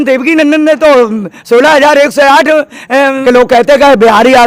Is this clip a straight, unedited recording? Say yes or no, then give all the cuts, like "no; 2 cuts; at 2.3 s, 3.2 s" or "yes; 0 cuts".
no; 1 cut; at 3.2 s